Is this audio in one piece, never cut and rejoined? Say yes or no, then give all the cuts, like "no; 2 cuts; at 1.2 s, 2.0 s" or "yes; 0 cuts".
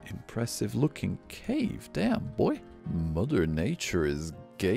yes; 0 cuts